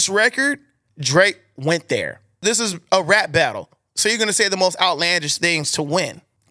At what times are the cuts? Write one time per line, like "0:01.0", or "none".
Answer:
none